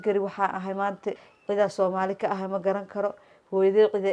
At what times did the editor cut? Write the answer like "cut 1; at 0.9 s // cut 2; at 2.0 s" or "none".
cut 1; at 1.3 s